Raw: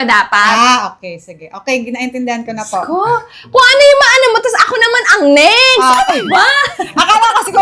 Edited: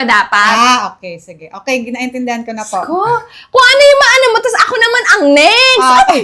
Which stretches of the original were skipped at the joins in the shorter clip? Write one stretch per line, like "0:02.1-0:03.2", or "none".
none